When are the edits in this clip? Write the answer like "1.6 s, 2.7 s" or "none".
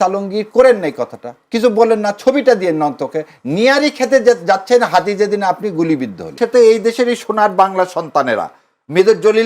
6.3 s